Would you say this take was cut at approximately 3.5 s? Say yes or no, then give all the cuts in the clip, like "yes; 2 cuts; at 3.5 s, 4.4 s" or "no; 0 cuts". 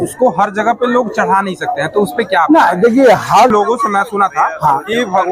yes; 1 cut; at 3.5 s